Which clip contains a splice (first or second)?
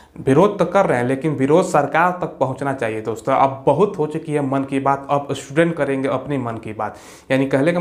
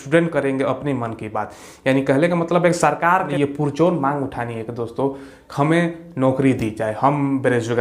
second